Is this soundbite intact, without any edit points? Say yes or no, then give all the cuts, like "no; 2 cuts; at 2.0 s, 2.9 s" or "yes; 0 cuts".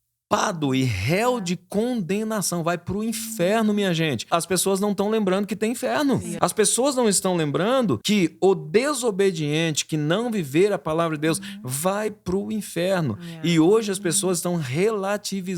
no; 3 cuts; at 4.2 s, 6.3 s, 8.0 s